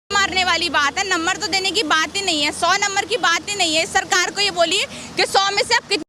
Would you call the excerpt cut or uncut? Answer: uncut